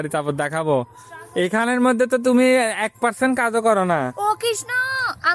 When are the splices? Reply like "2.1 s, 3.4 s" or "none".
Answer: none